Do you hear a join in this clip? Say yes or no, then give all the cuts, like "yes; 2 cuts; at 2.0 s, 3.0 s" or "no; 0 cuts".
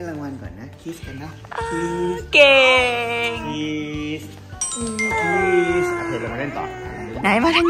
no; 0 cuts